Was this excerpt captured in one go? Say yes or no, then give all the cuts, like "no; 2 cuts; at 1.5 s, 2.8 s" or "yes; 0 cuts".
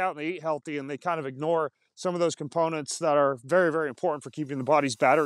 yes; 0 cuts